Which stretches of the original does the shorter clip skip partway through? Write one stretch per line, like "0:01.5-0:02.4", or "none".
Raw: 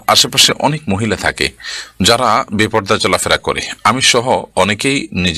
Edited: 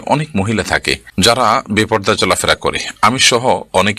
0:01.5-0:01.8